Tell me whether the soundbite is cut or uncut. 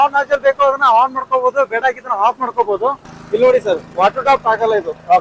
cut